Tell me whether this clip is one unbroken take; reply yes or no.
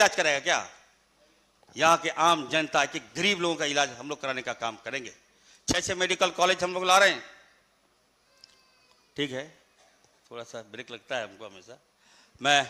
yes